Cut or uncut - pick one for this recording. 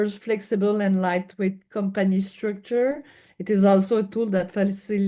uncut